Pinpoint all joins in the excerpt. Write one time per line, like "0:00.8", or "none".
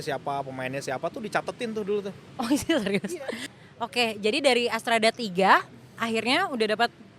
0:03.1